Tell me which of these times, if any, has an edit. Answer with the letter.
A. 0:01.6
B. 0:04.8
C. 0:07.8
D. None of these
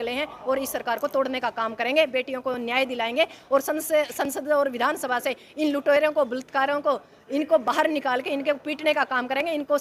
D